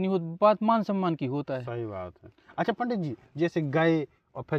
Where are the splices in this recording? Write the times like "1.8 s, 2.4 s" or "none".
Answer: none